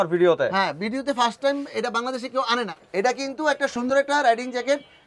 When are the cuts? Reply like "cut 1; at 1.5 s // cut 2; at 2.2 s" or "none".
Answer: cut 1; at 2.7 s